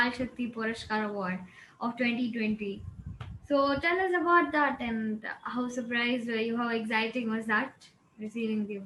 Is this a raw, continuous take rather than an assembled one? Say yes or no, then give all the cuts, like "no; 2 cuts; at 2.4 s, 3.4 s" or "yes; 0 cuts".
yes; 0 cuts